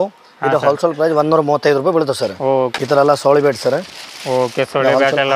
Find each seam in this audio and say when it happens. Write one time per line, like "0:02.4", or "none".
0:02.7